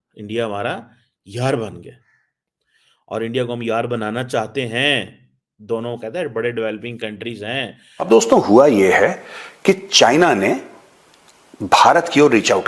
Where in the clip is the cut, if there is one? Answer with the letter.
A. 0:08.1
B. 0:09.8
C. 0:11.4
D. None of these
A